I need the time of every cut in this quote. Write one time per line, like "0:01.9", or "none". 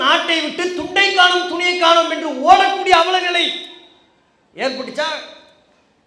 none